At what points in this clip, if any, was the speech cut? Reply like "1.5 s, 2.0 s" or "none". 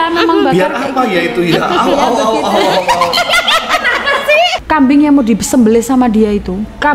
4.6 s